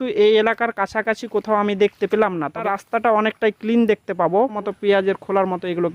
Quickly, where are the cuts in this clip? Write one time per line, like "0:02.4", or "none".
0:02.6
0:04.6

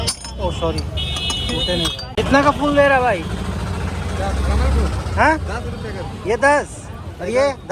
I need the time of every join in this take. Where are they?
none

